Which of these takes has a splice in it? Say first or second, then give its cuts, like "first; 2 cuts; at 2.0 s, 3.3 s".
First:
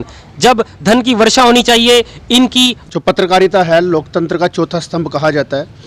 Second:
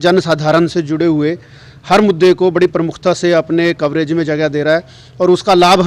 first; 1 cut; at 2.8 s